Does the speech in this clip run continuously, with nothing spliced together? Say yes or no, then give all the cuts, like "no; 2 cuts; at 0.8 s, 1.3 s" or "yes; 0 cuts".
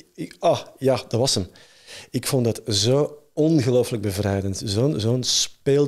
yes; 0 cuts